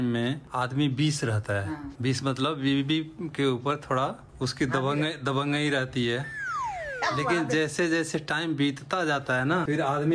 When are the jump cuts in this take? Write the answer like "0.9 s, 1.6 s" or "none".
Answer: none